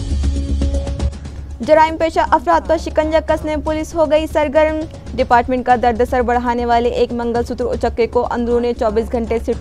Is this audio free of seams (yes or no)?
no